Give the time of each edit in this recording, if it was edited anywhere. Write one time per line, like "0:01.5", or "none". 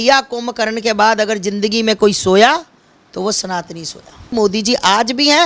0:04.3